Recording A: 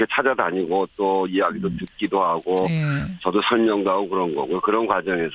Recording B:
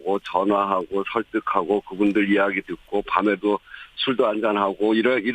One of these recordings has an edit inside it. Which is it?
B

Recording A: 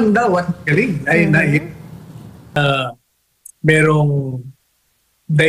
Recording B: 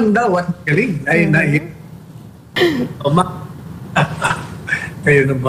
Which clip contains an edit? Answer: A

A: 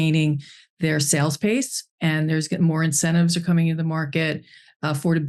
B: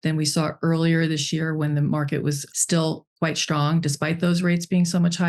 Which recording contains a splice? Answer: B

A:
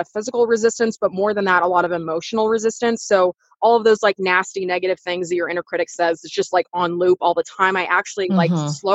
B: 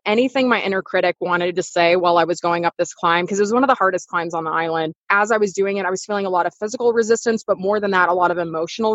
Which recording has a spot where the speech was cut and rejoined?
B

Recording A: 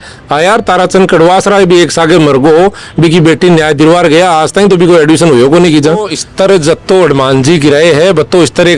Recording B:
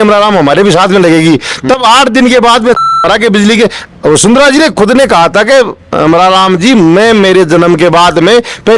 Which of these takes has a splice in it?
A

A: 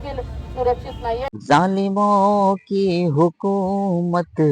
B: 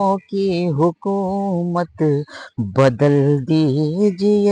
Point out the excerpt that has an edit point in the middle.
A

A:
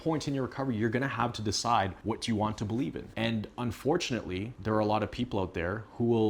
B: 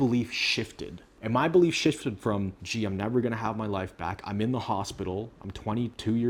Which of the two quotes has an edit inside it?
A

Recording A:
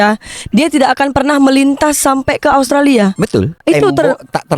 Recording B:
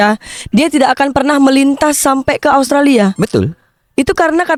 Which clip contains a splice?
A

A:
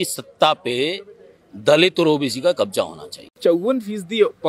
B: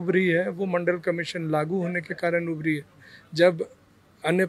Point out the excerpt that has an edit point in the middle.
A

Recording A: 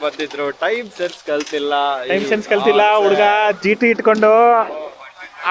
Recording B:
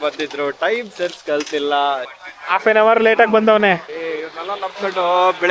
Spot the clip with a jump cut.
B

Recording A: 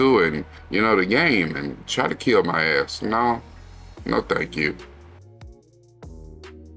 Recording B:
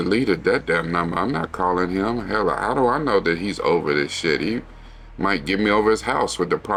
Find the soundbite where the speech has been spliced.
A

